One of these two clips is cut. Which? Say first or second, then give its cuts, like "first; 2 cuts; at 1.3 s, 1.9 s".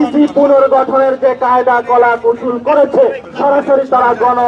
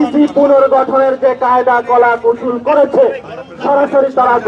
first; 1 cut; at 3.3 s